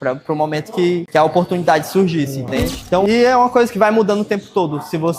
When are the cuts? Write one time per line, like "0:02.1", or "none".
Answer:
0:01.1
0:03.0